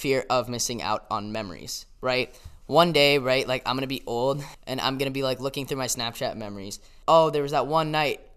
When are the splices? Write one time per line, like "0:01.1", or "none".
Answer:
0:04.5
0:06.9